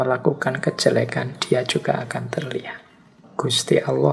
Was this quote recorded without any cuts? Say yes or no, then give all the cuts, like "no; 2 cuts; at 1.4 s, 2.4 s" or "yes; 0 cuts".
no; 1 cut; at 3.2 s